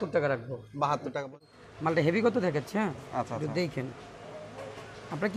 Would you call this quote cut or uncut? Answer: cut